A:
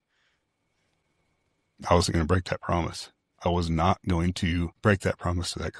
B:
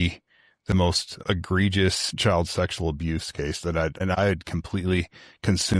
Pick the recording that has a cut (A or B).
B